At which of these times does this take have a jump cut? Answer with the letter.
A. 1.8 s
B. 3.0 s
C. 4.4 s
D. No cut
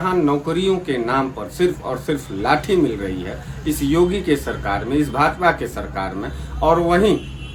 D